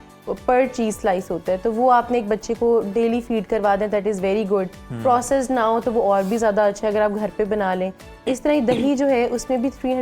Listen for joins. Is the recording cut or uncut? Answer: uncut